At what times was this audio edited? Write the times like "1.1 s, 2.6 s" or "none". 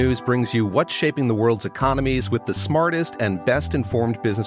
none